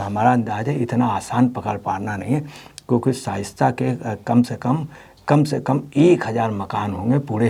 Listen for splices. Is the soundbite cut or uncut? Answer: uncut